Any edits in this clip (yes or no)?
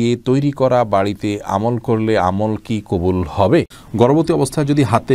yes